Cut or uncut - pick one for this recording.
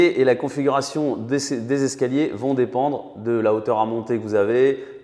uncut